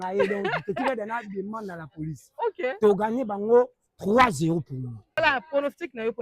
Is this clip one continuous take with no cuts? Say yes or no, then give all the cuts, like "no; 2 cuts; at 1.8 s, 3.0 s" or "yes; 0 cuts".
no; 1 cut; at 5.2 s